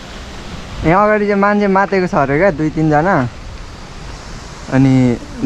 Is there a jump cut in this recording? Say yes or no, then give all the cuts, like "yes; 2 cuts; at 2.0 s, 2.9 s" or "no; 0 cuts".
no; 0 cuts